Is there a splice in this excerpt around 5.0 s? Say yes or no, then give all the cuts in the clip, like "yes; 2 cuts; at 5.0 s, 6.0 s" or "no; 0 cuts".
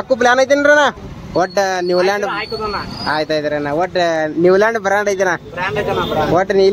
no; 1 cut; at 1.0 s